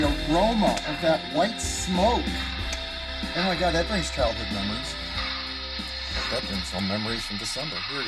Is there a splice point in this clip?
no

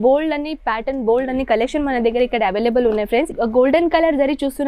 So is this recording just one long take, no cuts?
no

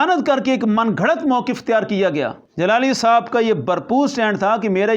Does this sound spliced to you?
yes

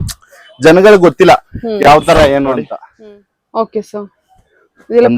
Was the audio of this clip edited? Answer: yes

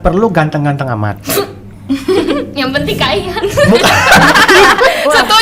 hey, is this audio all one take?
yes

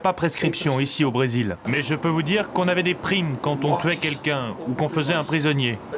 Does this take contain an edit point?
yes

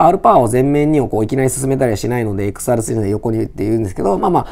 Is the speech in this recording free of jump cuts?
yes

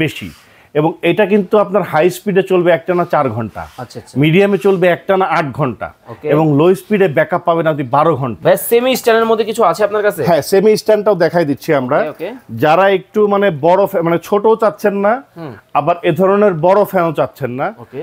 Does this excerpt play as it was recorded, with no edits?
no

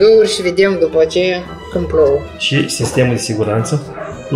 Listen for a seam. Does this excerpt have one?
yes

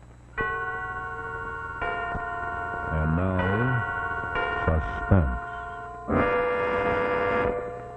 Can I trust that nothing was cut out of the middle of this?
no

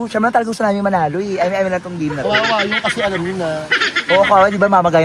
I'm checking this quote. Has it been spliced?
no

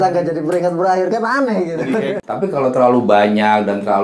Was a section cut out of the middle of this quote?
yes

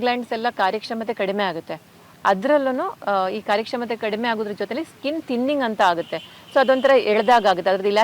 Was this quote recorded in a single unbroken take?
yes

